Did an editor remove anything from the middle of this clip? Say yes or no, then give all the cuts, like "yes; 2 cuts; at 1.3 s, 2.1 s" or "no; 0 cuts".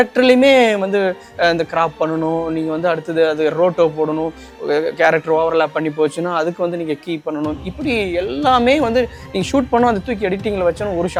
no; 0 cuts